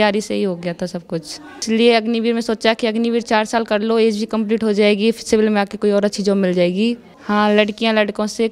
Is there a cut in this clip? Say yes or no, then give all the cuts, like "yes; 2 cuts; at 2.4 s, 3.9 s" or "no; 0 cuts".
yes; 2 cuts; at 1.6 s, 7.1 s